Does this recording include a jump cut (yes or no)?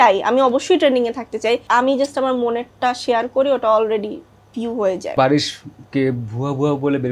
yes